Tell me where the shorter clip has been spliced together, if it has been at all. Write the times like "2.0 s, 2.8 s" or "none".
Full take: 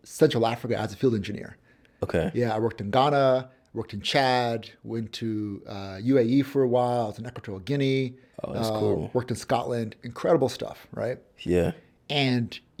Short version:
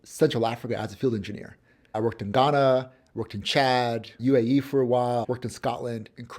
1.9 s, 4.1 s, 5.2 s